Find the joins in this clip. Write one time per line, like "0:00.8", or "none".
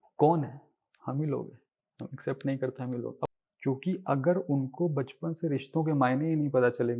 0:03.3